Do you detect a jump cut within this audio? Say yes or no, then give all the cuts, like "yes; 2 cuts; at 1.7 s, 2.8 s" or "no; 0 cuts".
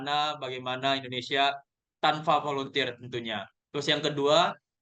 no; 0 cuts